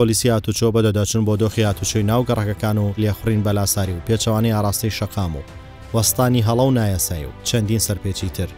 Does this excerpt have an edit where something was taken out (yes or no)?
yes